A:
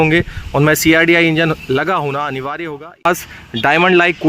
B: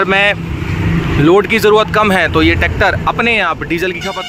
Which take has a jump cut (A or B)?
A